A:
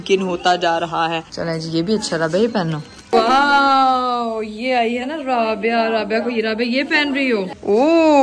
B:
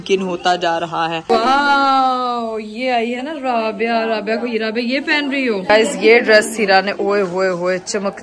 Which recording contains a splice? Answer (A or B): B